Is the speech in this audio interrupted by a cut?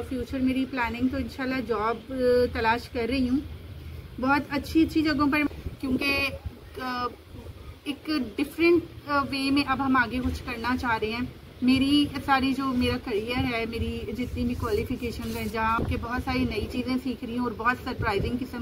yes; 2 cuts; at 5.5 s, 15.8 s

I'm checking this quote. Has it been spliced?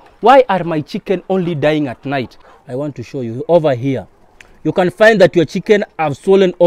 yes; 1 cut; at 2.4 s

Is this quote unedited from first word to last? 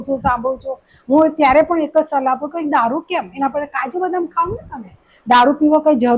yes; 0 cuts

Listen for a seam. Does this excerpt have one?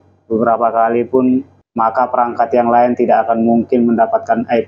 yes; 1 cut; at 1.6 s

